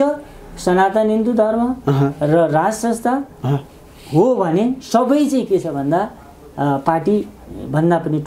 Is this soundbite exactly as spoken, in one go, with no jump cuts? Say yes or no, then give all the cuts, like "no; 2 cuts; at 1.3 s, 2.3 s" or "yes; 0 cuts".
yes; 0 cuts